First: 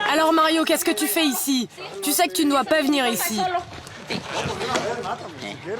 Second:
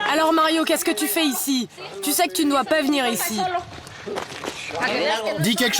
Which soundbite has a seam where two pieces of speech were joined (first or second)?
first